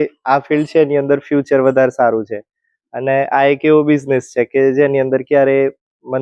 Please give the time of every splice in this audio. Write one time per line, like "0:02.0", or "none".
none

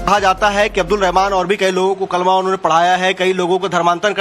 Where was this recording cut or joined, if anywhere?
0:01.1

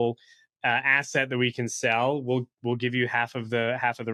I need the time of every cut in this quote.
none

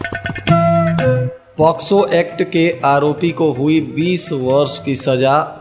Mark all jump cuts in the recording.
0:01.4

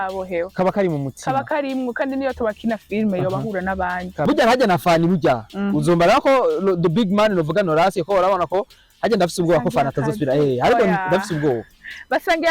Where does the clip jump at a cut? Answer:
0:04.2

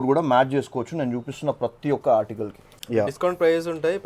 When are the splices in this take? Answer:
0:02.7

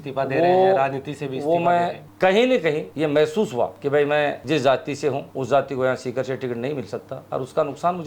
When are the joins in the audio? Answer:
0:02.0
0:02.9
0:03.8
0:04.4
0:05.3
0:07.2

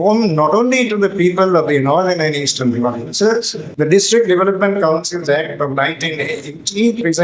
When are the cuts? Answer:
0:03.6

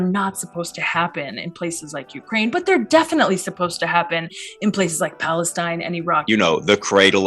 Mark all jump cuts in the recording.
0:06.2

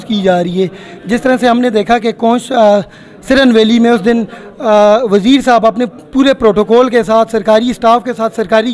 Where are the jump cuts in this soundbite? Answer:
none

